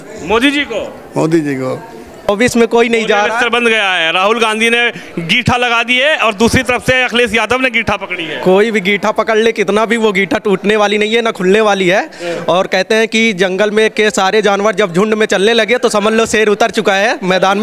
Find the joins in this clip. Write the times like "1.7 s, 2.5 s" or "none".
2.3 s